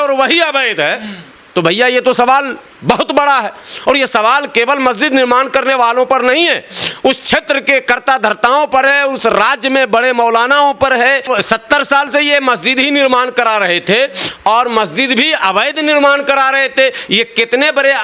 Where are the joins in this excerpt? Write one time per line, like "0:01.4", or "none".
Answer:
0:11.3